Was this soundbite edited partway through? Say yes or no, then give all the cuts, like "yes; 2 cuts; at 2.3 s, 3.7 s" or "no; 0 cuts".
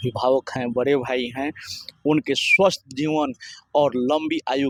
no; 0 cuts